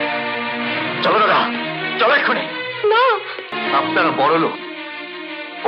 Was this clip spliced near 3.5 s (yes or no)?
yes